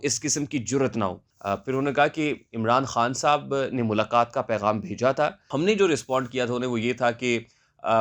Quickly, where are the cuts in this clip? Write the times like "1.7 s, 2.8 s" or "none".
1.3 s, 5.4 s